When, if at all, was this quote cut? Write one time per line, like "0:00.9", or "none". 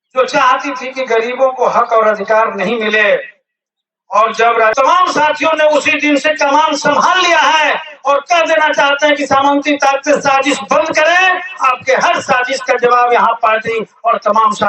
0:04.7